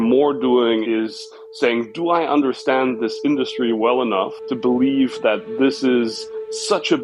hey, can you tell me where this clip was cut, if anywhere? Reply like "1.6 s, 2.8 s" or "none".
none